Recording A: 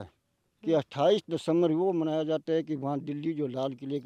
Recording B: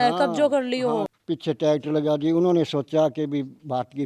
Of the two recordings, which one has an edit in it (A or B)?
B